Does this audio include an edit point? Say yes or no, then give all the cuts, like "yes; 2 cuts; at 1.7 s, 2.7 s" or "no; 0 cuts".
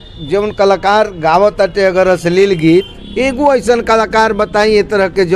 yes; 1 cut; at 3.0 s